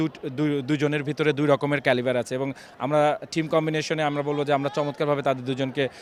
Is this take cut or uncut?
uncut